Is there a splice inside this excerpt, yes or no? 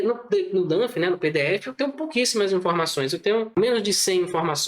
yes